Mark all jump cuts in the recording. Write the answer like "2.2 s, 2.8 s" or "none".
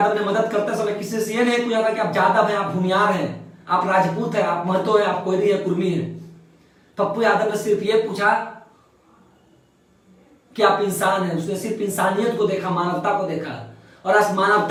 none